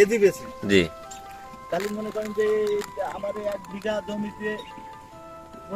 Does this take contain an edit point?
no; 0 cuts

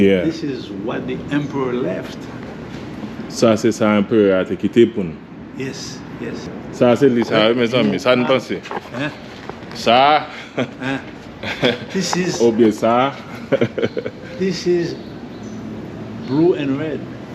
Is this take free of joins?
no; 1 cut; at 6.5 s

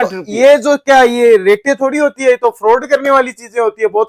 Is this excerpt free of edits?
yes; 0 cuts

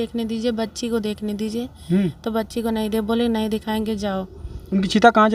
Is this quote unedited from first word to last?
yes; 0 cuts

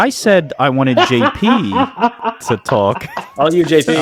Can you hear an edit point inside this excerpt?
no; 0 cuts

